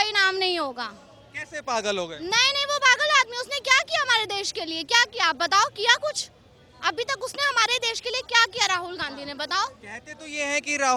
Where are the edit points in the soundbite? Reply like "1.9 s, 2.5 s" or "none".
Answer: none

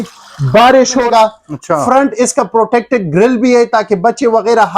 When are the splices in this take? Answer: 1.1 s

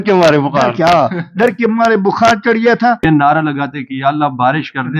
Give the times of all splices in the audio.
3.0 s

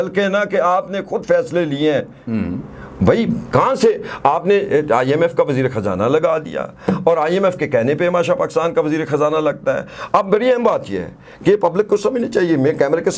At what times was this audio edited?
none

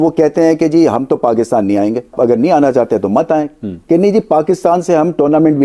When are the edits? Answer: 2.1 s

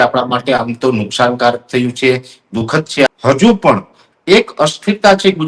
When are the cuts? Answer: 3.1 s

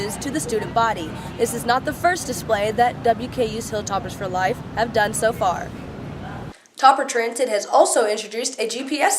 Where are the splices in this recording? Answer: 6.5 s

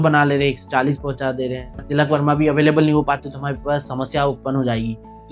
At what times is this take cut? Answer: 1.8 s

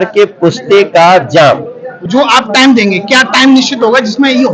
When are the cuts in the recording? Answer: 2.0 s

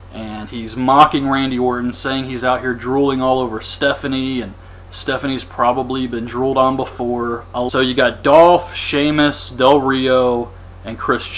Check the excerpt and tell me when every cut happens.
none

